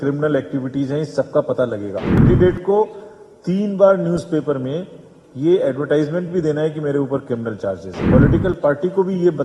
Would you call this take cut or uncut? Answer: cut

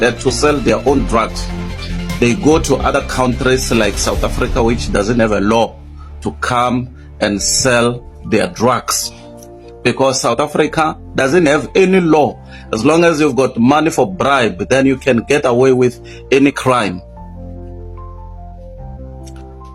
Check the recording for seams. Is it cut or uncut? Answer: uncut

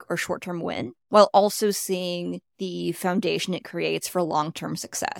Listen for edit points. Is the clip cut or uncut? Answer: cut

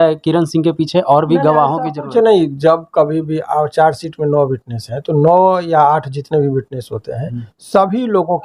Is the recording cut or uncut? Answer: uncut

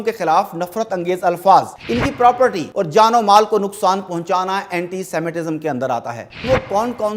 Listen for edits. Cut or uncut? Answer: cut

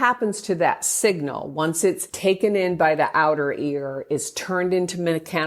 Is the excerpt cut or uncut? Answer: cut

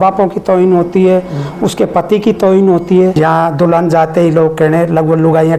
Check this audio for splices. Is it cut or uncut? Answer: cut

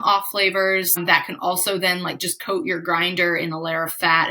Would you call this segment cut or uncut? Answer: cut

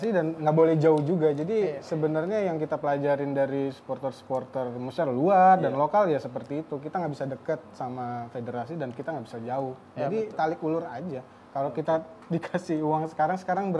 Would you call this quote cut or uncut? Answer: uncut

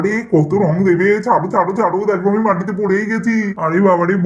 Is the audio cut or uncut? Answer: uncut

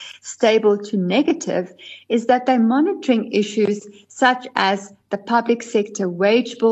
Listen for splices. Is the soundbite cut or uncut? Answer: uncut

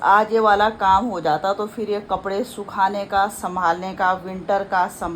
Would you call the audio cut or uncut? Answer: uncut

